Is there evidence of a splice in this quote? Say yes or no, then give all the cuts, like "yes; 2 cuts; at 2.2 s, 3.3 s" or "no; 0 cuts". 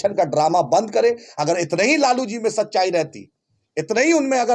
no; 0 cuts